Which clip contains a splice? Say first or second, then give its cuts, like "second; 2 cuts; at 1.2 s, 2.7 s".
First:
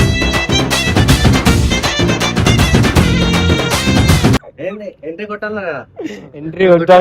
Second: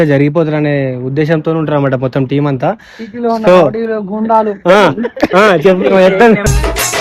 first; 1 cut; at 4.5 s